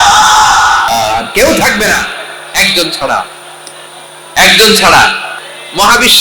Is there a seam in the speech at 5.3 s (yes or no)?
yes